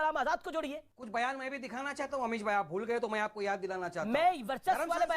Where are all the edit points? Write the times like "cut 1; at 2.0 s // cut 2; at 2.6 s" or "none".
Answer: cut 1; at 0.9 s